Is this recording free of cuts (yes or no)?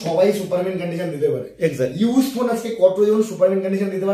yes